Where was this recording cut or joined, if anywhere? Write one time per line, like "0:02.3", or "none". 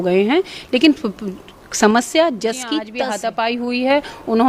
0:02.9